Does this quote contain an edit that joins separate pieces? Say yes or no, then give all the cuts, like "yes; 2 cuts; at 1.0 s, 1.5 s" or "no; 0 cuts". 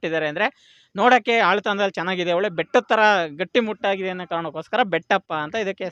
no; 0 cuts